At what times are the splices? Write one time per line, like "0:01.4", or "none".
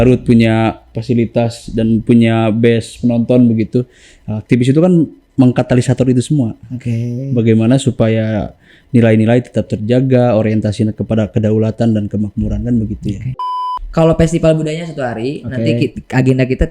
0:13.5